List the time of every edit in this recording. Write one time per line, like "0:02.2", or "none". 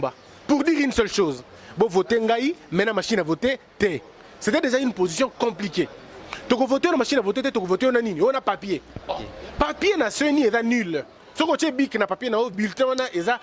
none